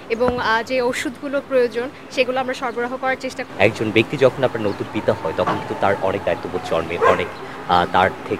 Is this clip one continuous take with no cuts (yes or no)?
no